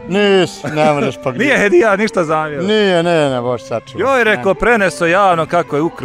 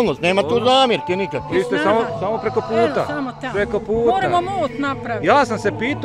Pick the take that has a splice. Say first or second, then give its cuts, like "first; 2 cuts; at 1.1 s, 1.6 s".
second; 1 cut; at 1.4 s